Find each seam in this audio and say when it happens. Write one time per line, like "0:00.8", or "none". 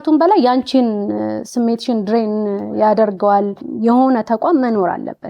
0:03.6